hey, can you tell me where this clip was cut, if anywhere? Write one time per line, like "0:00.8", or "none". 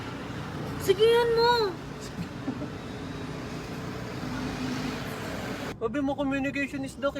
0:05.8